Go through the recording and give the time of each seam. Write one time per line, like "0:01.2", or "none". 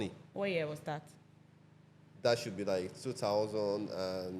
none